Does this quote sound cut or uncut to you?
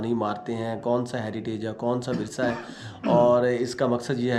uncut